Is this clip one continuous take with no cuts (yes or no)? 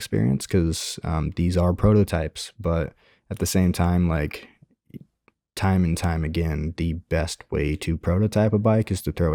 yes